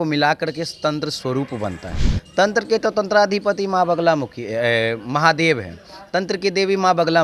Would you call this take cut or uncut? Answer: uncut